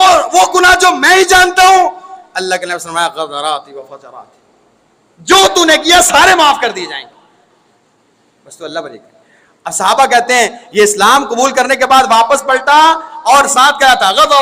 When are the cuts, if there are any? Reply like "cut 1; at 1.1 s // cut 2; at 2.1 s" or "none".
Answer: none